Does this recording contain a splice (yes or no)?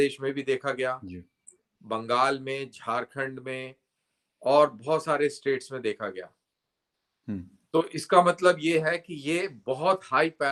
no